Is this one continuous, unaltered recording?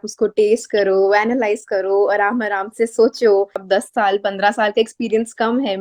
no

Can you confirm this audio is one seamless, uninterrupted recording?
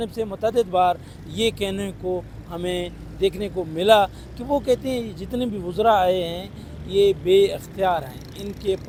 yes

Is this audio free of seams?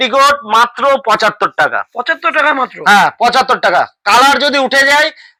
yes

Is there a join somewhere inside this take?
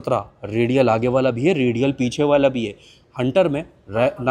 no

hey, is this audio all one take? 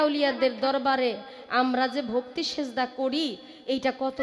yes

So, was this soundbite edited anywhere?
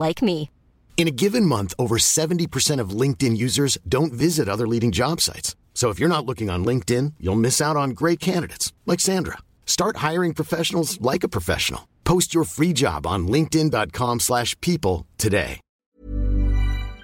yes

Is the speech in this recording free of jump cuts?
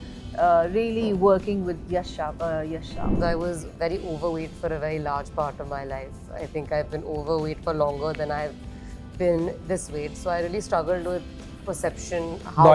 no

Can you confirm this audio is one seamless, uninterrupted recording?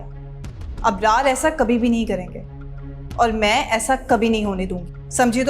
yes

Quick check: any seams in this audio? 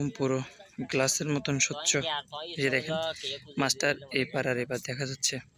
no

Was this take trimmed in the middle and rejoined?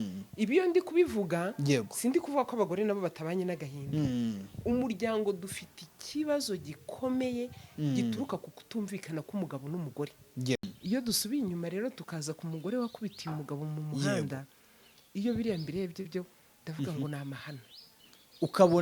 yes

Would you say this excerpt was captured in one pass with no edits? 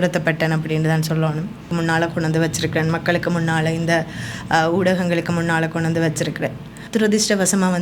no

